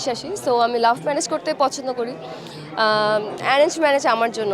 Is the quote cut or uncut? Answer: uncut